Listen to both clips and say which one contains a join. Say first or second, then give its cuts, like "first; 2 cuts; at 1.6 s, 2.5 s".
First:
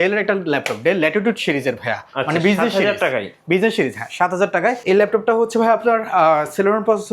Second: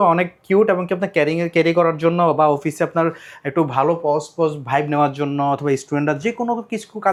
first; 1 cut; at 4.8 s